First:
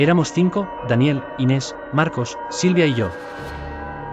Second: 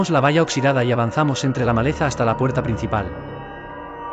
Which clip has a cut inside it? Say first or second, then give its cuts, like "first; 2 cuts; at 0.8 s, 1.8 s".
second; 1 cut; at 3.1 s